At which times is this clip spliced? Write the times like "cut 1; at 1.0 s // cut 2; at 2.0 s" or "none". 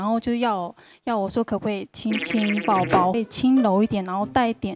cut 1; at 3.2 s